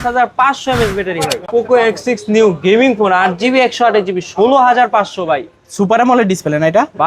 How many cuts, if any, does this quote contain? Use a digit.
1